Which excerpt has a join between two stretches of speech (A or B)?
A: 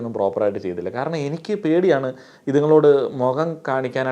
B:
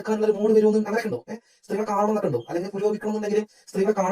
B